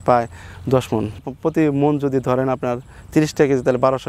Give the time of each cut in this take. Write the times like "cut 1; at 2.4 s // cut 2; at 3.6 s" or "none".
none